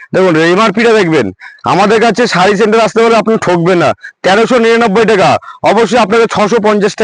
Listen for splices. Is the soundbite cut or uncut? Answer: uncut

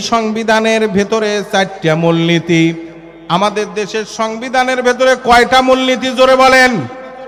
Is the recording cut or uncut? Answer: uncut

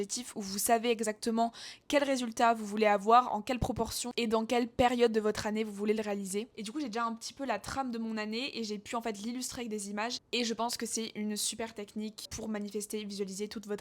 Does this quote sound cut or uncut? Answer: cut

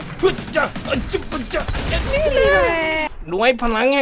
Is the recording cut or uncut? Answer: cut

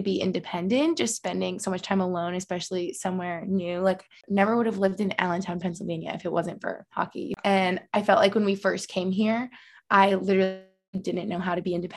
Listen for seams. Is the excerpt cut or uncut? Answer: cut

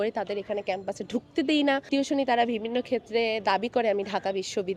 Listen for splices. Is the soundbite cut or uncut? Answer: uncut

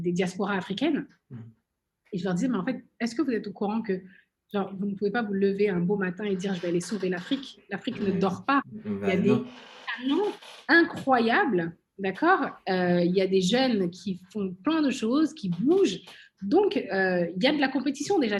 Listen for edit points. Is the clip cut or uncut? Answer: uncut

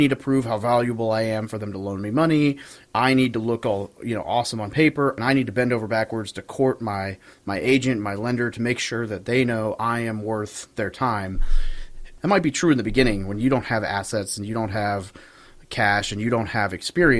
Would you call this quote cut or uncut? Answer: cut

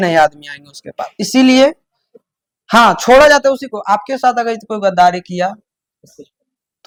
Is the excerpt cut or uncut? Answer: uncut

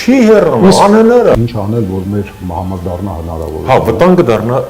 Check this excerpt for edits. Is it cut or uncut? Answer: cut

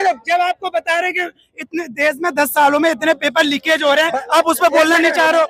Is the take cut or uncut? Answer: uncut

